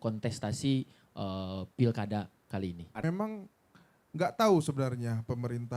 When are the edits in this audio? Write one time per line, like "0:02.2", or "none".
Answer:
0:03.0